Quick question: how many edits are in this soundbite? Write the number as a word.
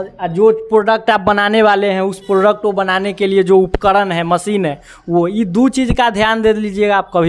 zero